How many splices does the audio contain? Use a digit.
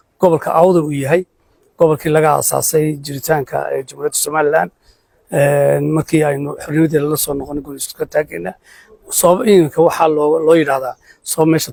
0